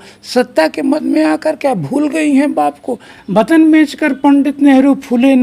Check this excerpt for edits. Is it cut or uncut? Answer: cut